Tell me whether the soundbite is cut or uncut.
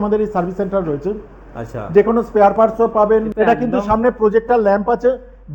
cut